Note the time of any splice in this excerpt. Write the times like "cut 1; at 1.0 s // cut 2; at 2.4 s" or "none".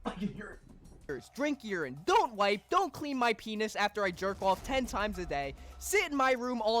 cut 1; at 1.1 s

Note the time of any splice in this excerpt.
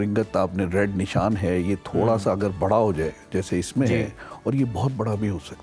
none

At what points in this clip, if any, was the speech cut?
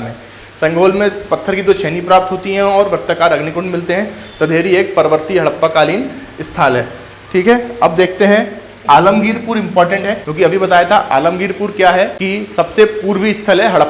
cut 1; at 8.8 s // cut 2; at 10.2 s // cut 3; at 12.2 s

